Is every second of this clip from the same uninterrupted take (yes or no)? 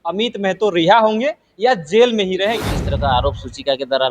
no